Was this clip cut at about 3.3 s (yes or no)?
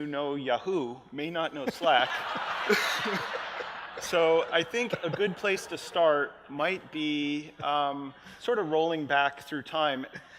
yes